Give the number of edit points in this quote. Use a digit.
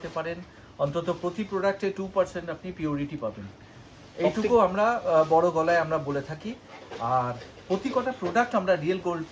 0